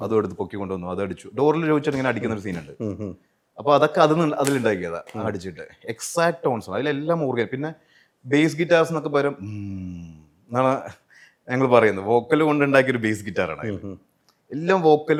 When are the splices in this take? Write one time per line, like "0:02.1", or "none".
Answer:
none